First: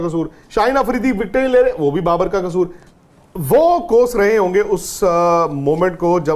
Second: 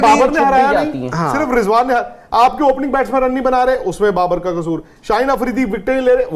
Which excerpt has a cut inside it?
first; 1 cut; at 2.8 s

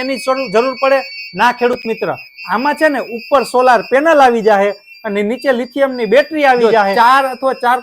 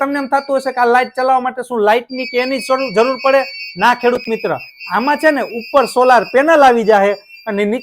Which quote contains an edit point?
first; 1 cut; at 6.9 s

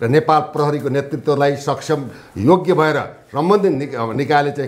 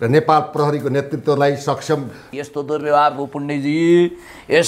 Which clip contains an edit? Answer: second; 1 cut; at 2.3 s

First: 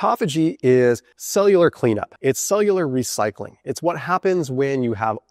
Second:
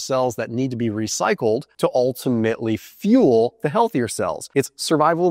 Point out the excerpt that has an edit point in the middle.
first; 2 cuts; at 1.1 s, 2.1 s

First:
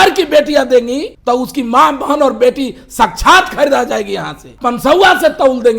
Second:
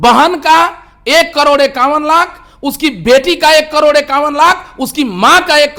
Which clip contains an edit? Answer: first; 2 cuts; at 1.1 s, 4.5 s

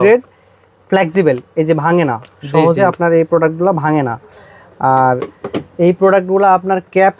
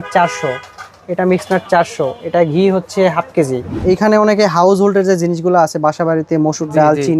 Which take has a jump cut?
second; 1 cut; at 3.8 s

